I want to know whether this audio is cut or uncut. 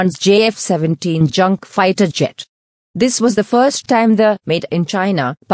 uncut